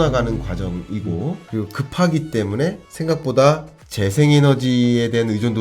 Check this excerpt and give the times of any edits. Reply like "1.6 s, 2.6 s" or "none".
1.4 s, 2.9 s